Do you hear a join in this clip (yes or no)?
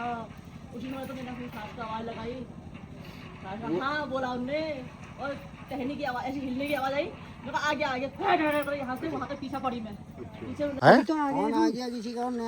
yes